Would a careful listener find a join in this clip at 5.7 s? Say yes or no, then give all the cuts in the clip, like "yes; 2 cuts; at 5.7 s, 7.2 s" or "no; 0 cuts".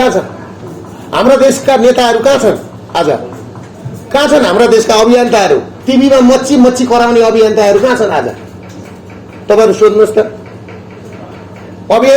yes; 1 cut; at 5.7 s